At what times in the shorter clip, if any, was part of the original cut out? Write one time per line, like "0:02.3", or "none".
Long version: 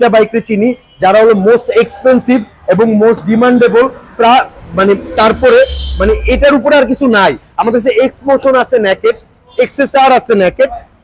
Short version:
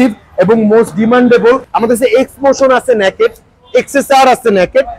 0:01.7